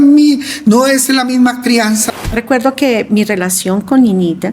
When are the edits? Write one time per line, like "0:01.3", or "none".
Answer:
0:02.1